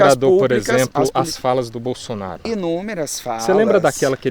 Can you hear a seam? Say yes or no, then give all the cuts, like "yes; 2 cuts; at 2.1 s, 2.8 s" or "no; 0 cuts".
yes; 1 cut; at 2.4 s